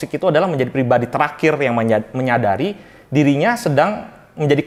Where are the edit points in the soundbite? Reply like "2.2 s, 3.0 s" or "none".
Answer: none